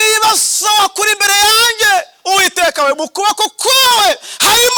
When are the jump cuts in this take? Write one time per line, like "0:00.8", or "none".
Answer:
none